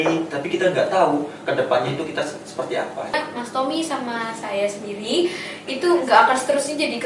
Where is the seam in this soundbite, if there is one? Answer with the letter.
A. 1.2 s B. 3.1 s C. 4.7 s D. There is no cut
B